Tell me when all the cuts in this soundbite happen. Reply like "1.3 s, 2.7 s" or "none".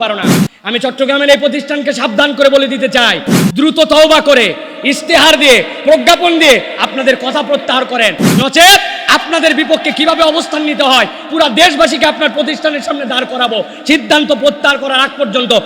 none